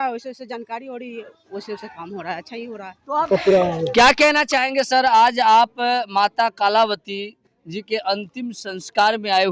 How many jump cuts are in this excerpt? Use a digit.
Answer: 0